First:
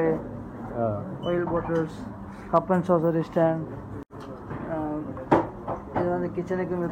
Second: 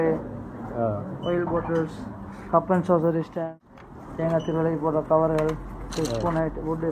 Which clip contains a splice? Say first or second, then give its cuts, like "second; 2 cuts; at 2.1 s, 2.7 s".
second; 1 cut; at 3.4 s